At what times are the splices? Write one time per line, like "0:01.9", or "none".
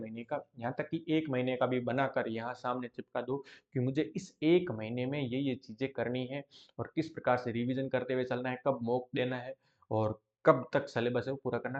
none